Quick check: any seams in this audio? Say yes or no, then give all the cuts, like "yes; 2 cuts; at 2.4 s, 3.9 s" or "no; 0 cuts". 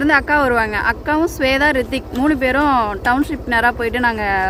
no; 0 cuts